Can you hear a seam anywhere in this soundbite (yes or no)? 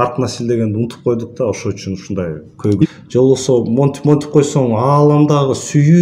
yes